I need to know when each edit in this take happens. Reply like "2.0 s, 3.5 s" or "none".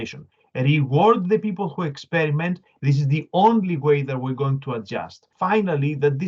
2.7 s, 5.3 s